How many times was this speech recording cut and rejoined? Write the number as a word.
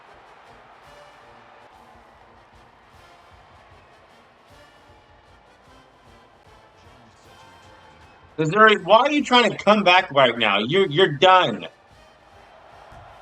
one